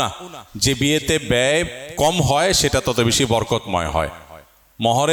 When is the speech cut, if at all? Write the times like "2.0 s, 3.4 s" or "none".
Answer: none